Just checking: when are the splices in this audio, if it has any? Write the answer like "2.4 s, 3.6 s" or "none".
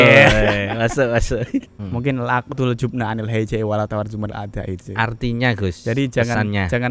1.8 s

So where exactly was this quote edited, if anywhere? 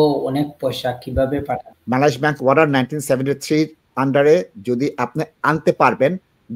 1.7 s

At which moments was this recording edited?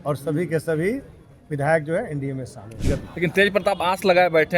2.8 s

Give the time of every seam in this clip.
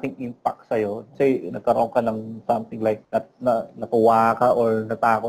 1.1 s, 3.0 s

